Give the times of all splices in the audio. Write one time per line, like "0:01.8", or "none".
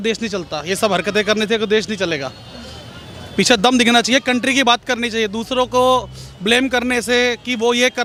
none